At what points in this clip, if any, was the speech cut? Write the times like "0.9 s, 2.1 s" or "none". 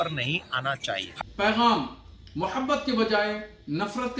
1.1 s

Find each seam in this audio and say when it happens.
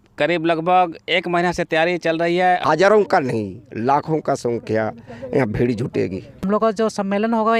2.6 s, 6.3 s

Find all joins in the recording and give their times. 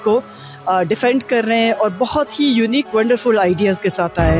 none

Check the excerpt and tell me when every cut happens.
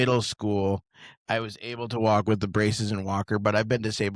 none

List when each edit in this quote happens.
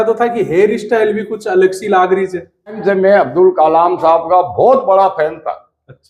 2.8 s

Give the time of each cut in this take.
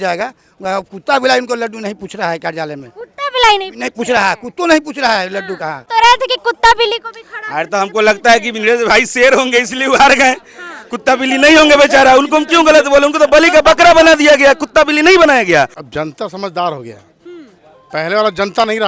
5.8 s, 15.8 s

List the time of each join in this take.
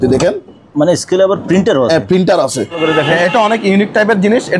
2.8 s

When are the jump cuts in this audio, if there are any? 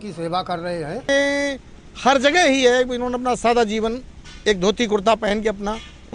1.1 s

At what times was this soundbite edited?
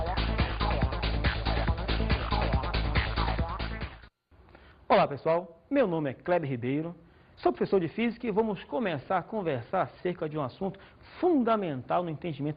9.1 s

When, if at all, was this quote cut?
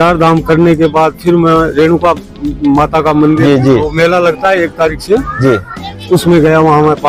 none

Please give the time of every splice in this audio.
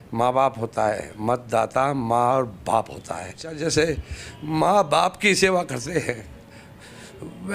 3.5 s

